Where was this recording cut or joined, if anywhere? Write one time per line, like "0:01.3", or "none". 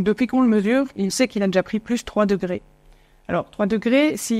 none